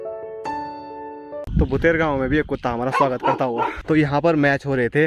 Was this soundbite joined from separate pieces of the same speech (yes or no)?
yes